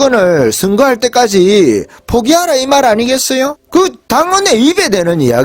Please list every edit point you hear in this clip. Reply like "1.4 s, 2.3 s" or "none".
3.6 s